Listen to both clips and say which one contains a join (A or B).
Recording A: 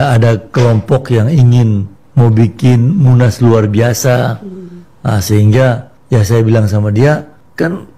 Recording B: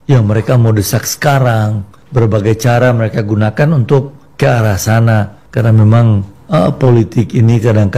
B